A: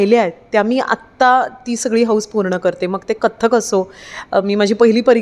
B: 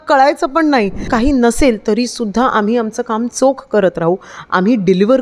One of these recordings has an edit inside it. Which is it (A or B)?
B